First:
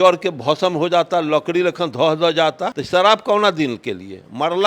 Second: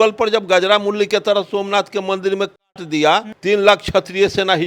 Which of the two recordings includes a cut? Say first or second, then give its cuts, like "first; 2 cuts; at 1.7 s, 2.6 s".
first; 1 cut; at 2.7 s